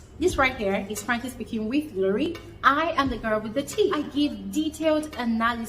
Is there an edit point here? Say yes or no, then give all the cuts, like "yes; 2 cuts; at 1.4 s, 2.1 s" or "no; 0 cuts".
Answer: yes; 1 cut; at 4.1 s